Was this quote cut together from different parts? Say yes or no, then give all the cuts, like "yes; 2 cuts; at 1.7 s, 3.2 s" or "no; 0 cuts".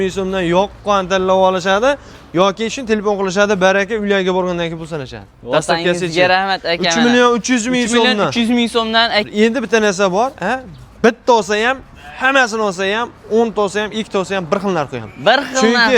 yes; 1 cut; at 9.2 s